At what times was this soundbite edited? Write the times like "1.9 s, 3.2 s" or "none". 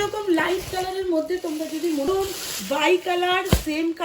2.1 s

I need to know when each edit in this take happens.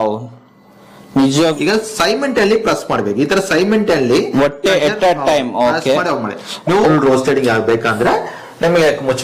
1.4 s, 6.9 s

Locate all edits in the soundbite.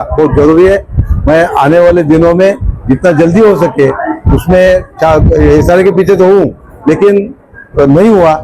none

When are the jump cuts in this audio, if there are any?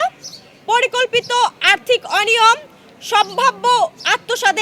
none

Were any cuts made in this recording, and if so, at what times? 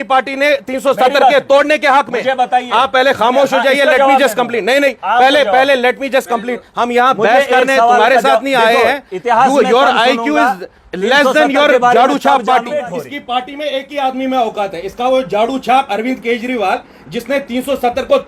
12.8 s

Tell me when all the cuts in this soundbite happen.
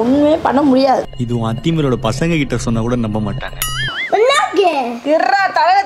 3.9 s

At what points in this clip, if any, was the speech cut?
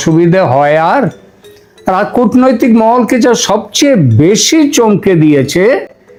none

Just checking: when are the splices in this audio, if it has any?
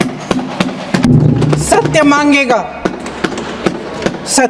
none

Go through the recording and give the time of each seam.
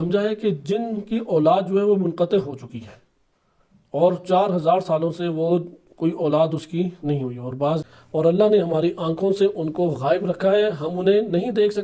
7.8 s

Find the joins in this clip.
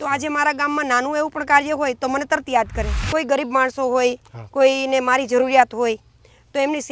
3.0 s

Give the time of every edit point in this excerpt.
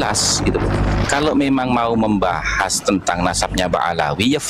1.0 s

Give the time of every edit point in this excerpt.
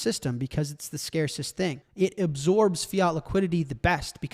1.8 s

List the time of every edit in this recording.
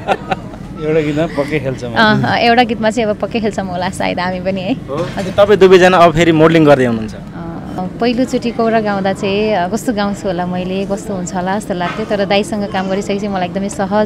7.8 s

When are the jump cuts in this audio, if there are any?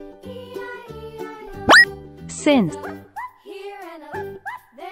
1.0 s

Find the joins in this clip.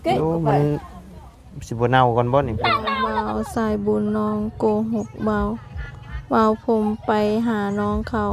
3.0 s

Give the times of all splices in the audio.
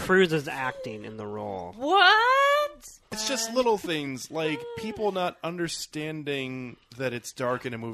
3.2 s

